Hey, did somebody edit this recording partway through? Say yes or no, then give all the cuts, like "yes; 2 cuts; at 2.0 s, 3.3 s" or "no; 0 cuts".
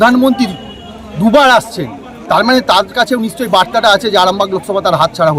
no; 0 cuts